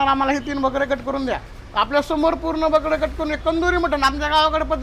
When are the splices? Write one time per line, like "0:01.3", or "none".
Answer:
none

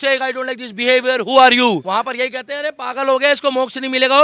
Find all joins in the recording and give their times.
none

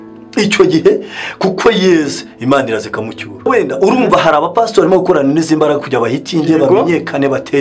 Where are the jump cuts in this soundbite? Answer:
0:03.5

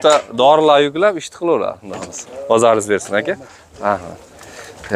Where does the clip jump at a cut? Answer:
none

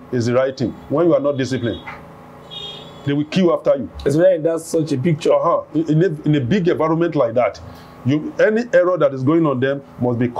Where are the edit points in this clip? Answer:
none

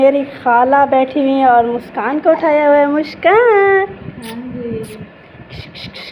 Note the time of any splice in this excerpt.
none

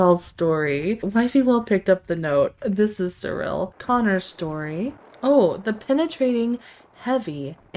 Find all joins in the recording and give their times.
0:01.0
0:03.7
0:05.0

